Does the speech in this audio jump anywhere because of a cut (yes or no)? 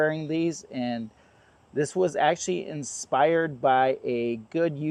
no